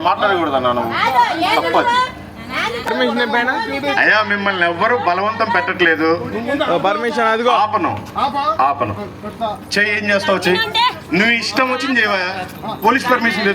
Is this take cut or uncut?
cut